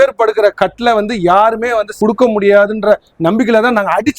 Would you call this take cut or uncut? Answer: cut